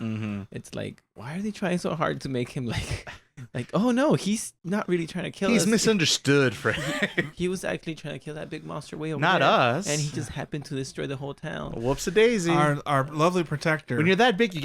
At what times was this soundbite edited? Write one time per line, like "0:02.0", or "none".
0:04.5

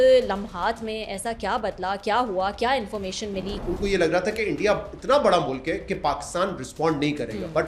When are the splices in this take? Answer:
0:03.6

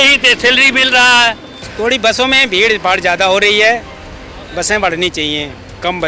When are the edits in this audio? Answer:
0:01.6

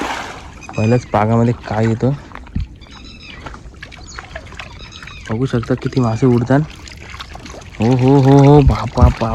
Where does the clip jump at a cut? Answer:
none

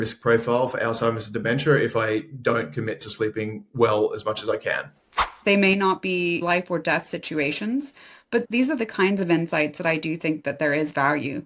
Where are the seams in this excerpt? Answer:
0:05.0
0:06.4

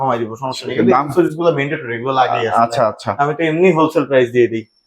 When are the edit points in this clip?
none

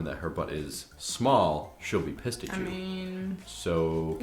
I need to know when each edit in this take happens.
none

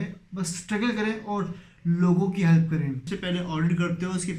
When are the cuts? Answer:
0:03.1

